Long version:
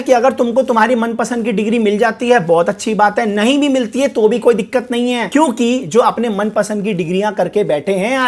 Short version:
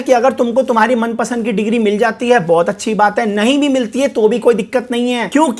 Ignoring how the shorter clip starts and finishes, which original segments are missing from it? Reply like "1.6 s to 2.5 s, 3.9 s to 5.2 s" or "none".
none